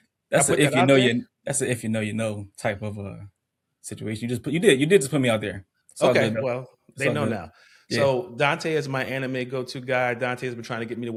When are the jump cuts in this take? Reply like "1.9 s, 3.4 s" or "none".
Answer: none